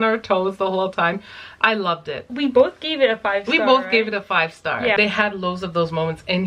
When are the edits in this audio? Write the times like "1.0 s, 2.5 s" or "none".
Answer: 2.3 s, 5.0 s